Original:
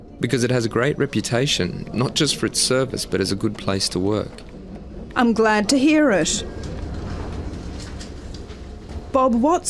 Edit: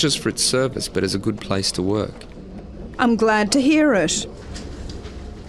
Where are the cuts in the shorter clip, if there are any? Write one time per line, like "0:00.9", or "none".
0:04.4